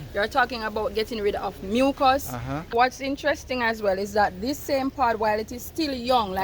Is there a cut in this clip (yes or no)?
yes